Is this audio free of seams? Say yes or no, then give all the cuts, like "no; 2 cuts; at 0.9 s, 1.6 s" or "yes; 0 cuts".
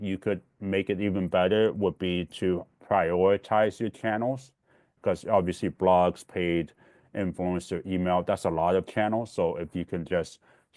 yes; 0 cuts